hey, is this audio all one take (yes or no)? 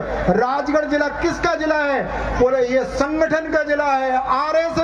yes